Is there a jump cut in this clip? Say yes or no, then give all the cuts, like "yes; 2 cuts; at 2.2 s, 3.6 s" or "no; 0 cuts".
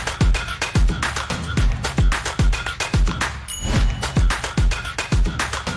no; 0 cuts